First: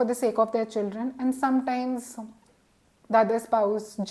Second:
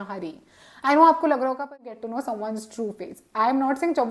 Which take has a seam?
second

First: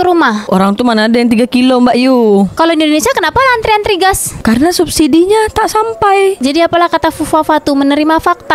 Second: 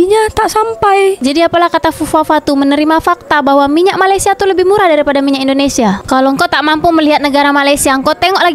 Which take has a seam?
second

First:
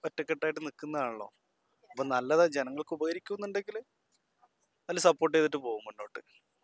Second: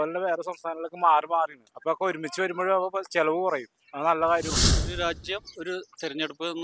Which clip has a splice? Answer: second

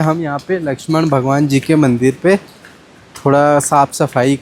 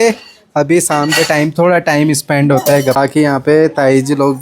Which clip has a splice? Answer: second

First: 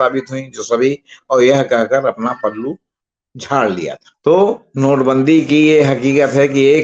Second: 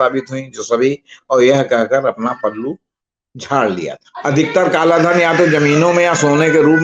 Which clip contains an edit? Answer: second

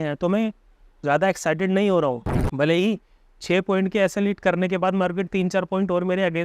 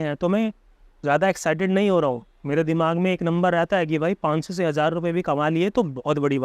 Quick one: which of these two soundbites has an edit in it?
first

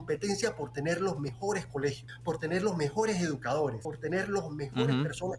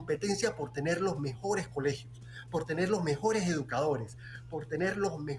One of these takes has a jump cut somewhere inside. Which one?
first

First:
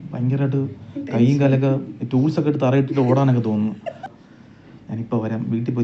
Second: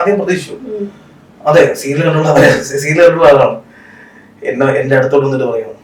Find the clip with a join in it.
first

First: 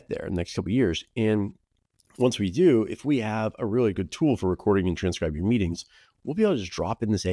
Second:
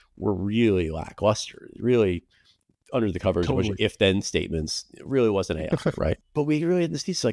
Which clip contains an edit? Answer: second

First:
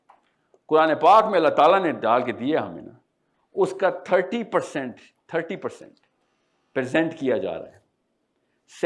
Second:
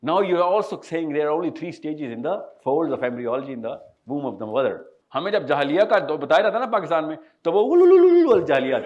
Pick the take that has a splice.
second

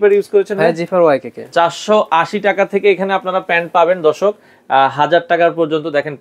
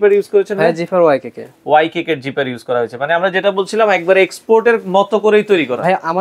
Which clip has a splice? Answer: first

